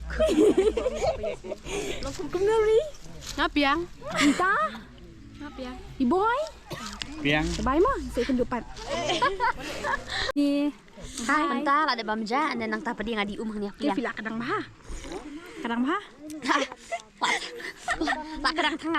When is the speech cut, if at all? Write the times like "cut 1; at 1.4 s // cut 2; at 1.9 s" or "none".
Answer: cut 1; at 10.4 s